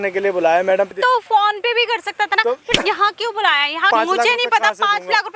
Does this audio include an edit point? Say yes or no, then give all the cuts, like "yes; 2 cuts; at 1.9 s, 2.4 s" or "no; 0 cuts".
yes; 2 cuts; at 0.9 s, 3.9 s